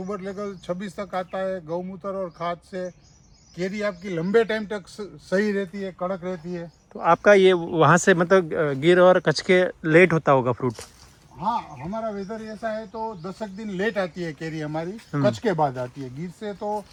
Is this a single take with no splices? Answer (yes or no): yes